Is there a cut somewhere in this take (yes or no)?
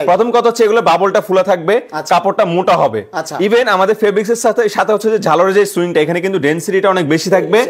no